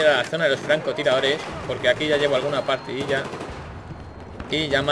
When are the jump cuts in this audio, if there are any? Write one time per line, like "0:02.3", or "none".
0:03.2